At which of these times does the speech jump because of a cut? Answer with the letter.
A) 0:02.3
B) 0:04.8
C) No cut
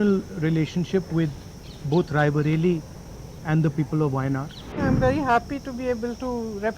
B